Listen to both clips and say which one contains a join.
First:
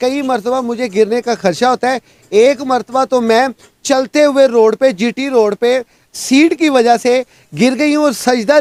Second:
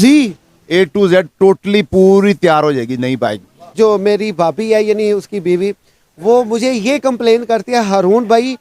second; 1 cut; at 3.7 s

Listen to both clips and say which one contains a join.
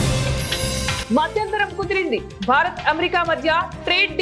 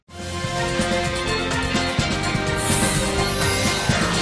first; 1 cut; at 1.0 s

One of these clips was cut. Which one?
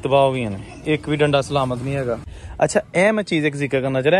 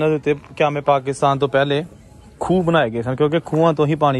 first; 1 cut; at 2.4 s

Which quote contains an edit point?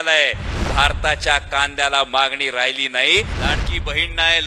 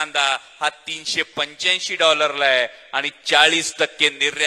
first; 1 cut; at 3.3 s

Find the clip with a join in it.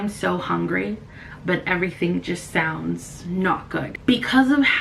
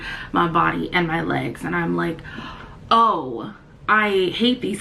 first; 1 cut; at 3.9 s

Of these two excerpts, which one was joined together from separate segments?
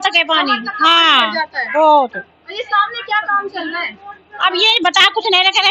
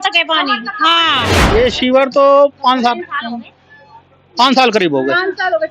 second; 1 cut; at 1.3 s

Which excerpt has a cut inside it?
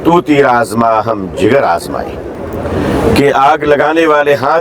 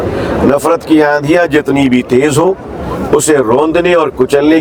first; 1 cut; at 2.3 s

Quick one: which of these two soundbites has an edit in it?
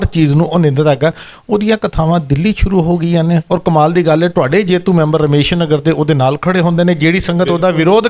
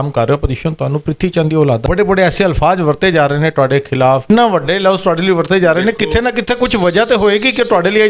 second; 2 cuts; at 1.8 s, 4.3 s

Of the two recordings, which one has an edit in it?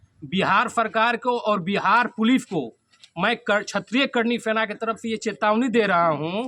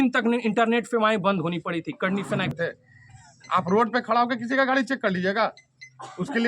second; 1 cut; at 2.5 s

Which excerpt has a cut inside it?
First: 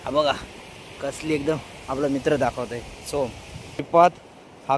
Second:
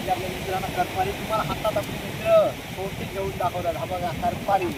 first; 1 cut; at 3.8 s

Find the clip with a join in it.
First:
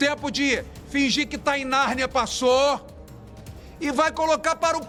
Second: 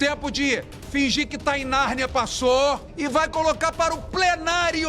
second; 1 cut; at 2.9 s

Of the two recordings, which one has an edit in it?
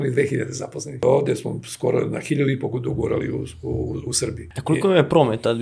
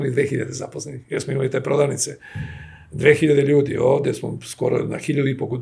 first; 2 cuts; at 1.0 s, 4.5 s

